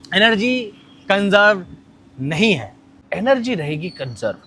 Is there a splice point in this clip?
yes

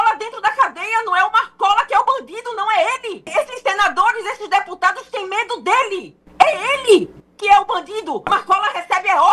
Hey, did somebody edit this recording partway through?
yes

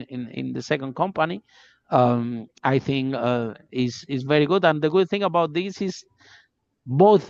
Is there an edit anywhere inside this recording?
no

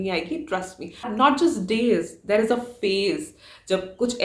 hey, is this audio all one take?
no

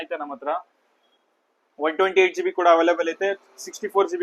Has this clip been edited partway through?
no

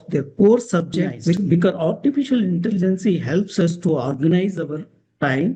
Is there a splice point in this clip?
yes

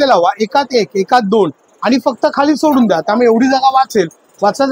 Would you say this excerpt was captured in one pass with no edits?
yes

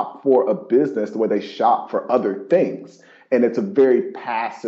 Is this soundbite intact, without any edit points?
yes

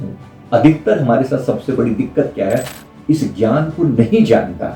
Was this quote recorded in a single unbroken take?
no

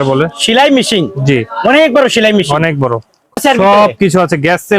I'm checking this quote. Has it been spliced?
yes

